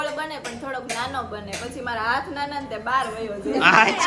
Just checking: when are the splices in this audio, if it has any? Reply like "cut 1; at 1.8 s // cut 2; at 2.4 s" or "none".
none